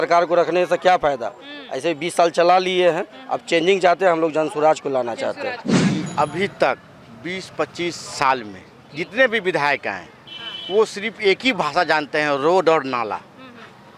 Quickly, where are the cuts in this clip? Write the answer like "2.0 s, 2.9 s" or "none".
5.9 s